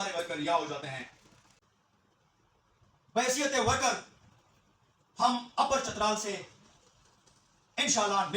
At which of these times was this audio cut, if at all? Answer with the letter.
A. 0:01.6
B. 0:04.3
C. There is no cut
A